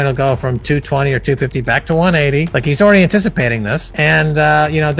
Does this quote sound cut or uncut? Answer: uncut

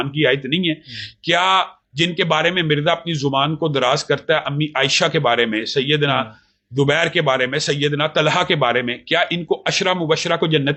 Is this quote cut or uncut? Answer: uncut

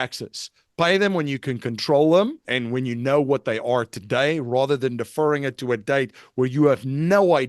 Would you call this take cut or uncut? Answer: cut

